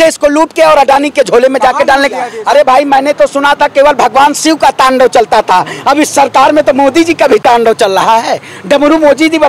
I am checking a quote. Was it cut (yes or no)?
yes